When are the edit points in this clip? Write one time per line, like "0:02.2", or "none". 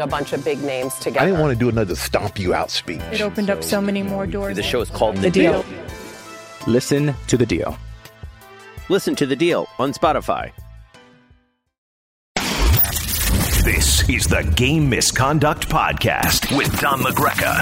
0:12.2